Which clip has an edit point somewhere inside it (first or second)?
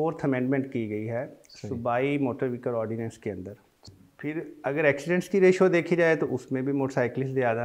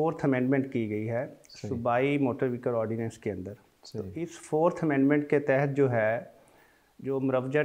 first